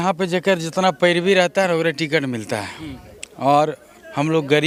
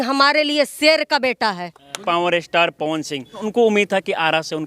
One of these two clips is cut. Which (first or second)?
second